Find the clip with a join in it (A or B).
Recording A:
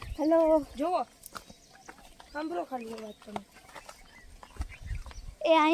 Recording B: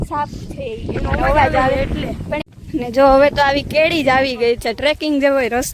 B